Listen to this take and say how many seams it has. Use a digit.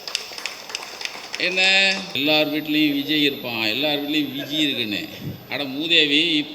1